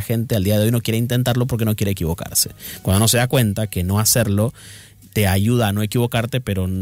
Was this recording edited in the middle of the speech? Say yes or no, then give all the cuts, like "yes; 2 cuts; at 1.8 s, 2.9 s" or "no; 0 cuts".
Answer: no; 0 cuts